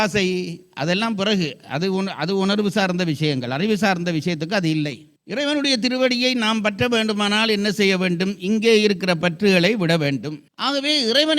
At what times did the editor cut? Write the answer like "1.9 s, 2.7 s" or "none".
5.1 s, 10.4 s